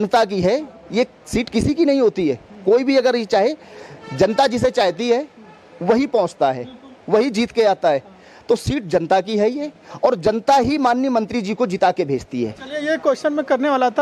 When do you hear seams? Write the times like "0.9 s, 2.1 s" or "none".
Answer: none